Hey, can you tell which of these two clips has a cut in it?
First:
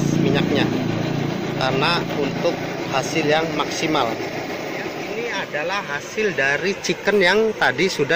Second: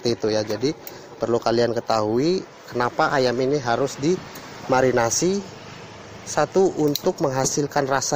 first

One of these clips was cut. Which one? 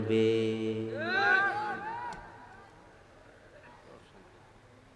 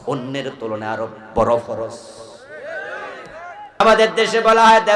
second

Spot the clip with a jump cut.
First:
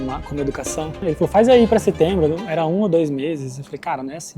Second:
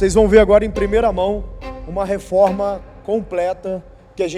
first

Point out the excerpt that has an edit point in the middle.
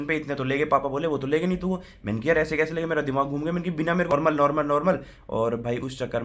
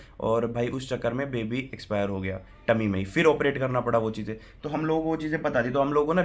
first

